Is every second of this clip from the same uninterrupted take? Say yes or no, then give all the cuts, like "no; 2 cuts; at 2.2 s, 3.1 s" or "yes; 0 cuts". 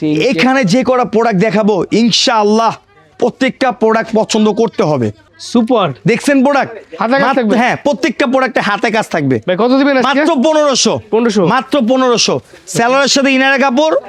yes; 0 cuts